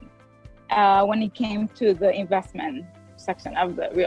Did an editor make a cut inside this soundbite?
no; 0 cuts

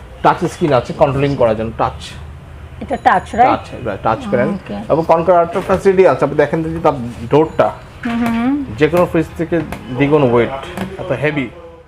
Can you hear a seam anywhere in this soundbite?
no; 0 cuts

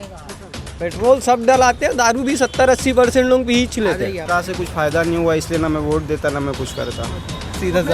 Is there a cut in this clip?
yes; 1 cut; at 4.2 s

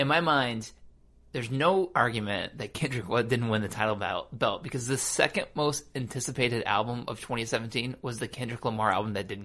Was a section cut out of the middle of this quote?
no; 0 cuts

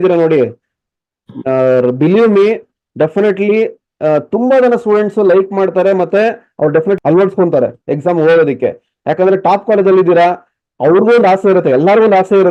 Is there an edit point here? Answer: no; 0 cuts

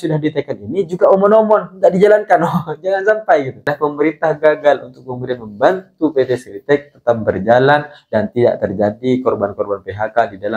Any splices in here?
yes; 1 cut; at 3.7 s

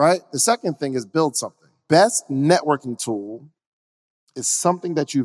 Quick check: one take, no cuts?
no; 1 cut; at 1.7 s

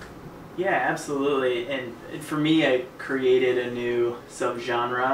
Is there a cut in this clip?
no; 0 cuts

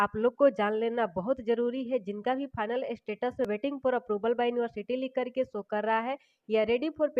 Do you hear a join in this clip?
no; 0 cuts

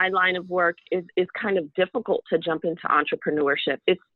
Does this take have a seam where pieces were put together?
no; 0 cuts

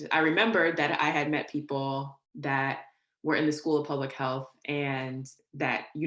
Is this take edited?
yes; 1 cut; at 2.2 s

